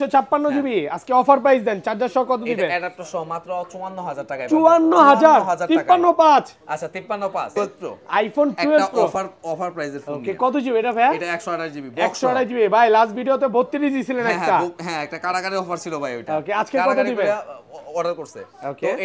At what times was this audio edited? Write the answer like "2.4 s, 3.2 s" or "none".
7.5 s